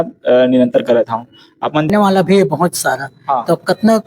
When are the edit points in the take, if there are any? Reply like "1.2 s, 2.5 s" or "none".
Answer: 1.9 s